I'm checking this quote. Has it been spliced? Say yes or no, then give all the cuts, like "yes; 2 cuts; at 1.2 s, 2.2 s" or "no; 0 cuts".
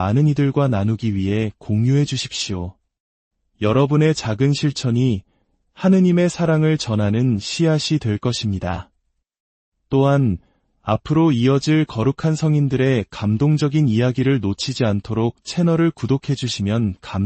no; 0 cuts